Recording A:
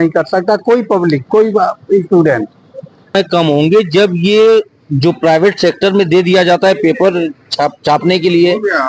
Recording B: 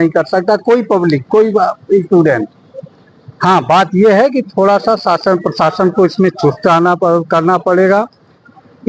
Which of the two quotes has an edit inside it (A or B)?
A